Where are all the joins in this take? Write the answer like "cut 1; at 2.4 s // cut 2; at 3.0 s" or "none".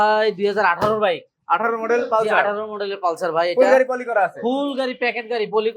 none